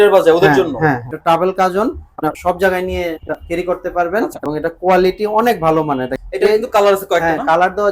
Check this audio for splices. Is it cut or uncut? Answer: cut